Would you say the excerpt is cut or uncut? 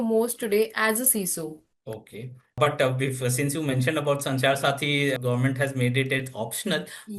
cut